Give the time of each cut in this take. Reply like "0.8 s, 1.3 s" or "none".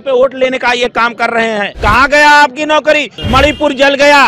1.7 s, 3.1 s

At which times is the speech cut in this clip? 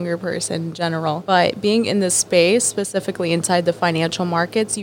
1.2 s

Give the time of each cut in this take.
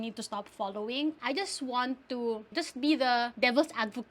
1.2 s, 2.5 s

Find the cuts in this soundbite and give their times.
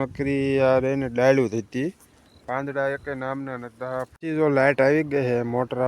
4.2 s

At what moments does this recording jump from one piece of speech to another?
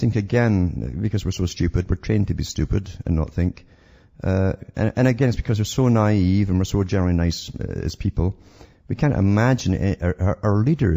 7.3 s

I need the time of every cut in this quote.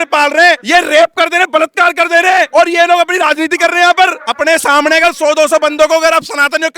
4.3 s

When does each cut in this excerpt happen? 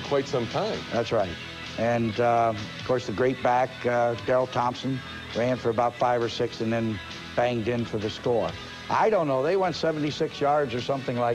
1.9 s

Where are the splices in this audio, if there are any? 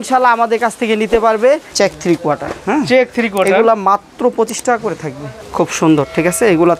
1.7 s, 5.4 s

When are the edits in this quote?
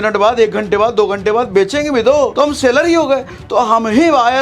2.3 s

